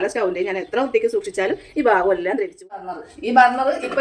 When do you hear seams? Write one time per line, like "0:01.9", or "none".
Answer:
0:02.8